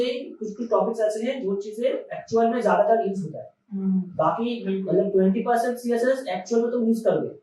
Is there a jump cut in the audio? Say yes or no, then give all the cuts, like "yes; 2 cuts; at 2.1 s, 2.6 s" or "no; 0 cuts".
no; 0 cuts